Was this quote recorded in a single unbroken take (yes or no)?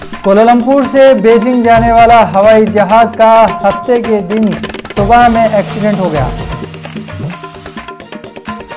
yes